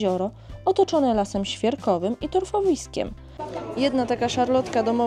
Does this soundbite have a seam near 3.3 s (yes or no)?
yes